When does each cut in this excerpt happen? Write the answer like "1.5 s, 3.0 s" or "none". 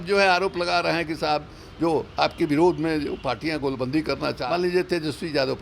4.4 s